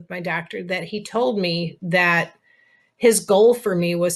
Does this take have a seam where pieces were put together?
no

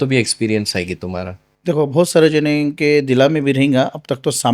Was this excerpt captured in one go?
yes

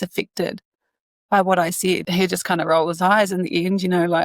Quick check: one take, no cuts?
no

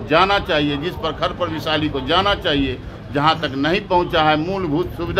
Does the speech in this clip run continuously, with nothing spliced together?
yes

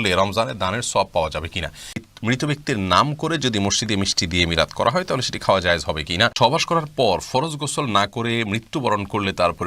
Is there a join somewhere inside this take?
yes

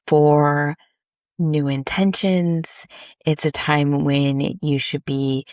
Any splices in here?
no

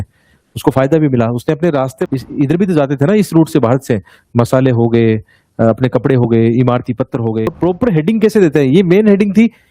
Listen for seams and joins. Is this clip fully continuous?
no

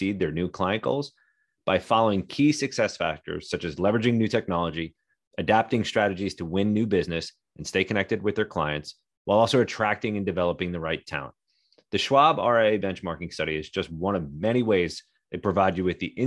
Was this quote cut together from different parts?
no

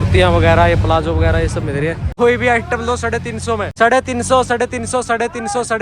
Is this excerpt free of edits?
no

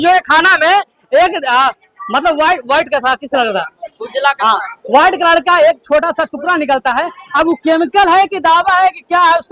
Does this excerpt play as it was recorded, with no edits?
yes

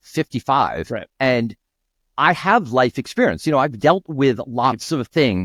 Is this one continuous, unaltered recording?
yes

